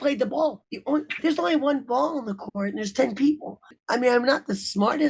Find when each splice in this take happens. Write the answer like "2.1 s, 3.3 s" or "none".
3.8 s